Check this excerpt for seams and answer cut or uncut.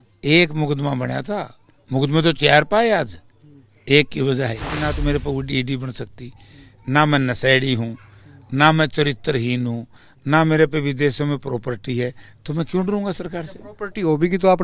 cut